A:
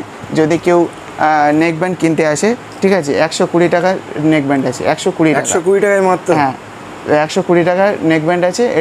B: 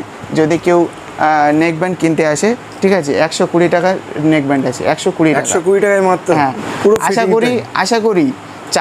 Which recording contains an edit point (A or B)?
B